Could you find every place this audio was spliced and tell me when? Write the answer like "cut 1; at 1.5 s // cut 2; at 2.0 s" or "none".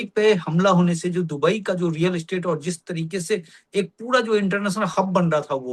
none